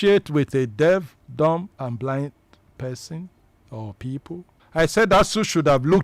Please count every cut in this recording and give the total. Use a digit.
2